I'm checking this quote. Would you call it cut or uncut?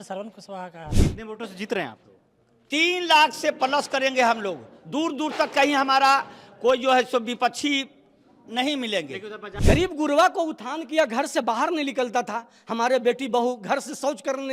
cut